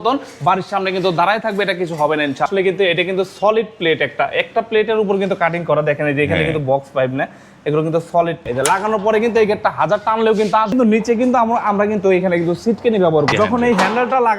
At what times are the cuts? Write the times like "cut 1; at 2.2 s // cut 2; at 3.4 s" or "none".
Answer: cut 1; at 2.5 s // cut 2; at 8.4 s // cut 3; at 10.7 s // cut 4; at 13.3 s

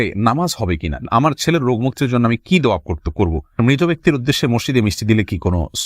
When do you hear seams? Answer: cut 1; at 1.0 s // cut 2; at 3.6 s

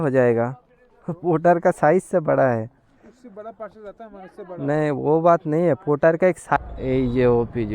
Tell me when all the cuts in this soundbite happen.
cut 1; at 6.6 s

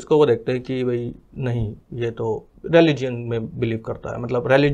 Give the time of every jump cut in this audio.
cut 1; at 2.5 s

